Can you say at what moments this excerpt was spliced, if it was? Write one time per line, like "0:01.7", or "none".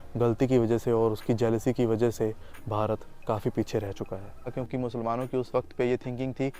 0:04.5

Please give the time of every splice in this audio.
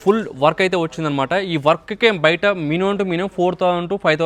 none

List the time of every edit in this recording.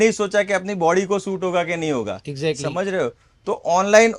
none

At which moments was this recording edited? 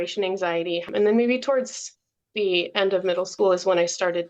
0:00.9
0:03.3

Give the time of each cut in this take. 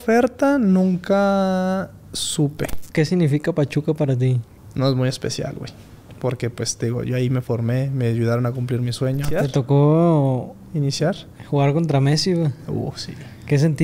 0:02.8
0:09.3

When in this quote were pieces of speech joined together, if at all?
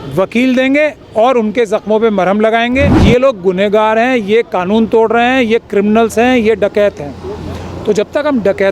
0:02.9

